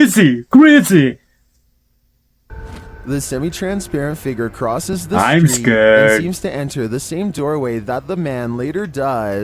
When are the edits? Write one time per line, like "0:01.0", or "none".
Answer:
0:02.5